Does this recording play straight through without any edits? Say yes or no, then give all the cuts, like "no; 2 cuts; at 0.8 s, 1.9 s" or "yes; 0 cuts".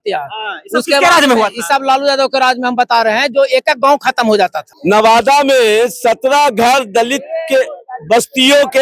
no; 1 cut; at 4.7 s